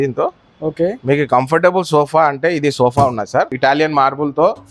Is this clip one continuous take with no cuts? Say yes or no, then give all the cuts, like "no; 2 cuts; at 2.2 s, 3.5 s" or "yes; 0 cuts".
no; 1 cut; at 3.5 s